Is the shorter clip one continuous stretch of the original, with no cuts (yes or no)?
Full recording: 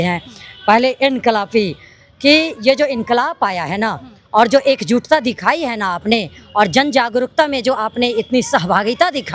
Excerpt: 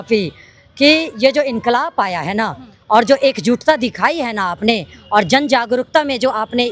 yes